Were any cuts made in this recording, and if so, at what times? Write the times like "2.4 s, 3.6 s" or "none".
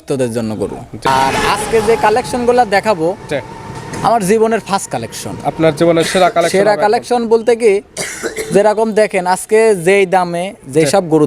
1.1 s